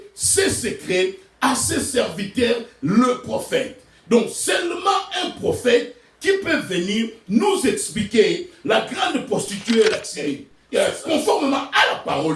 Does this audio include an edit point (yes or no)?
yes